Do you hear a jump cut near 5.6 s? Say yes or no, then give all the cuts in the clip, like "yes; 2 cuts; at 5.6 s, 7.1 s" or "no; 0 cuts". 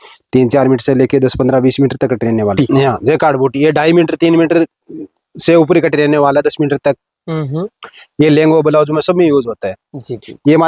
no; 1 cut; at 2.5 s